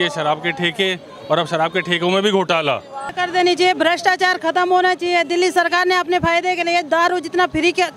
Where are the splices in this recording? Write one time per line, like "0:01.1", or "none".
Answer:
0:03.1